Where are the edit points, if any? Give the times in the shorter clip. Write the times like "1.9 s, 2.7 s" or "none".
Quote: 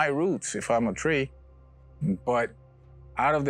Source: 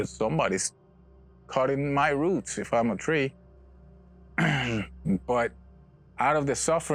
1.9 s